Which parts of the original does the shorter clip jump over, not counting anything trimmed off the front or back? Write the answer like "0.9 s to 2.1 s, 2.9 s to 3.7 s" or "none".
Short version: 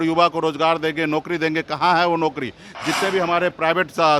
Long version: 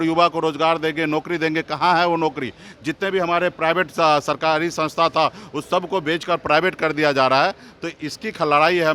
none

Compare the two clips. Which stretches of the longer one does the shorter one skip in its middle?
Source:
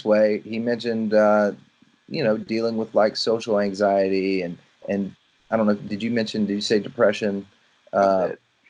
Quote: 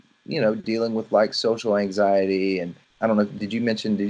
4.6 s to 5.3 s

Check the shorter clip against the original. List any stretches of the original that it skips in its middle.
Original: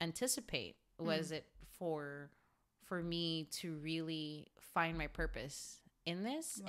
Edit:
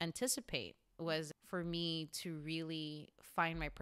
1.3 s to 2.7 s

